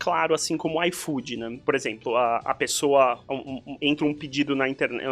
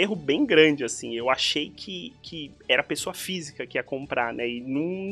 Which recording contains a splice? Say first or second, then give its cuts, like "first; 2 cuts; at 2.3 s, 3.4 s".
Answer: first; 1 cut; at 1.5 s